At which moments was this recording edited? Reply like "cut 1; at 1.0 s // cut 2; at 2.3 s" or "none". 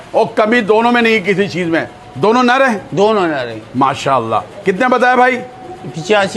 none

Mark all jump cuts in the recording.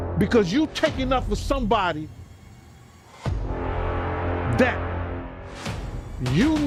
none

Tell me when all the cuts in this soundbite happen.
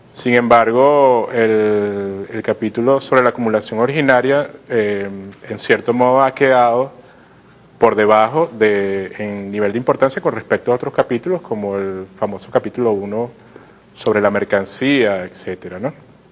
none

